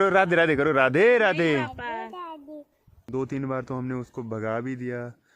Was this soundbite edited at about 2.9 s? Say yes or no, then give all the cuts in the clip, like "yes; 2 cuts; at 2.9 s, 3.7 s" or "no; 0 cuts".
yes; 1 cut; at 2.9 s